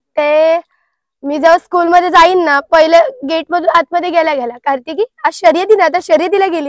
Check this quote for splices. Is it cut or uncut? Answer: uncut